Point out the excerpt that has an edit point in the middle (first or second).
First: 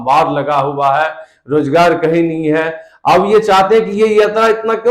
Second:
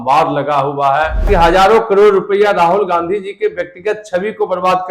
second